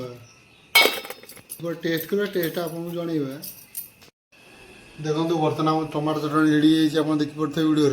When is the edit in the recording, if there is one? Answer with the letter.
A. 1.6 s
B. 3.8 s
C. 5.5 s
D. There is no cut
A